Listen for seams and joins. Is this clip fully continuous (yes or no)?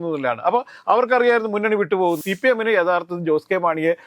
no